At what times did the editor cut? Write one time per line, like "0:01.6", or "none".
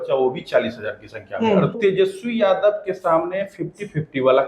0:01.8

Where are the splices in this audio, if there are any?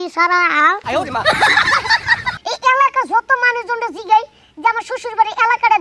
0:02.4

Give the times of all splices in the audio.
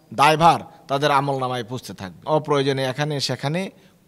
0:02.2

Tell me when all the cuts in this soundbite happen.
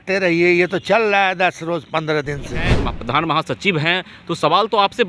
0:02.9

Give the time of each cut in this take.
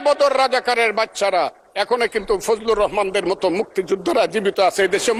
none

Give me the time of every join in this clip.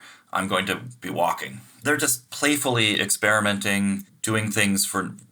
0:04.1

